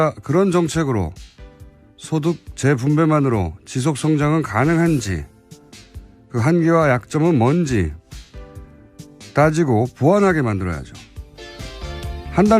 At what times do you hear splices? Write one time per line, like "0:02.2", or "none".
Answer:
0:09.3